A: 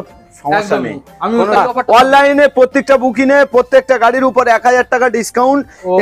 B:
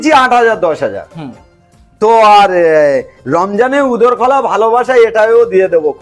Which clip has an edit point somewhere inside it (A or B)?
A